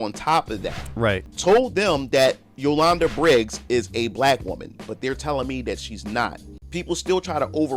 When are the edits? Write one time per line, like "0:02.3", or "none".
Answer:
0:01.3
0:06.5